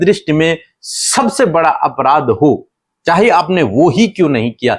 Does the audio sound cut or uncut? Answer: uncut